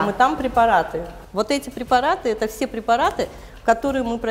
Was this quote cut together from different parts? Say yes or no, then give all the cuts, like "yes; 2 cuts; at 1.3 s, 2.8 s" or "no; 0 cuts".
no; 0 cuts